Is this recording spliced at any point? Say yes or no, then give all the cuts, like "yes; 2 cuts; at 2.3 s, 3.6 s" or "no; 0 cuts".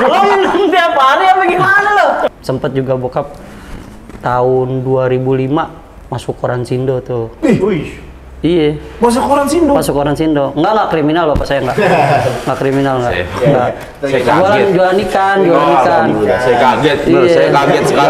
yes; 1 cut; at 2.4 s